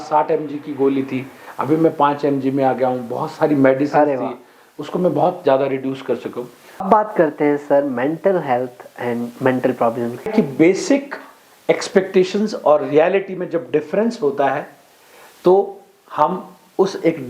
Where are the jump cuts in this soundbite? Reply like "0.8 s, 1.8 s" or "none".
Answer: 6.8 s, 10.3 s

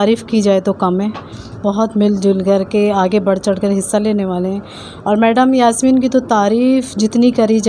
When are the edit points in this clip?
none

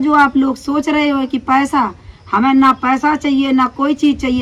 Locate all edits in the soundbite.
none

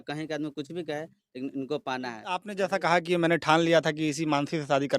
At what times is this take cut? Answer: 2.5 s

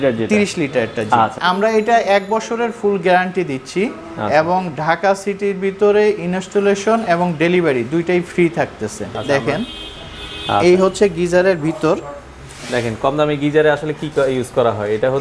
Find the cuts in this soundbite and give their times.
1.4 s, 9.2 s

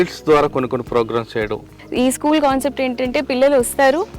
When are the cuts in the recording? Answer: 1.7 s

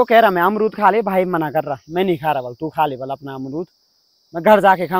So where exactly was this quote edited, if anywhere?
none

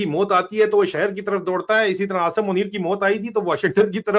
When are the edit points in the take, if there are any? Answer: none

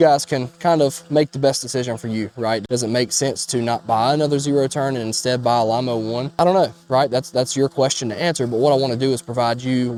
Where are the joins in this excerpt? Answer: none

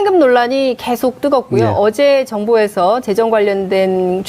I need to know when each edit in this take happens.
none

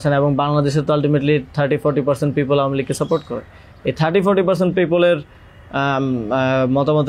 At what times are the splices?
none

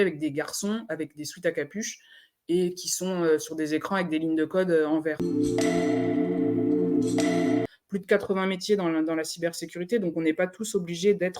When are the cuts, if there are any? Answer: 5.2 s, 7.7 s

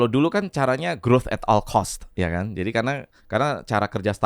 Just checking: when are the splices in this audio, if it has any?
2.0 s, 3.1 s

